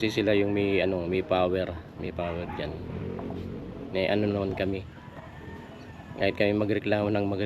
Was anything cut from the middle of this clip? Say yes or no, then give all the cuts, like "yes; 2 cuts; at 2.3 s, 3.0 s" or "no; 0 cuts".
no; 0 cuts